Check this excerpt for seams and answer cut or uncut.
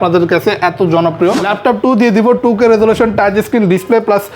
cut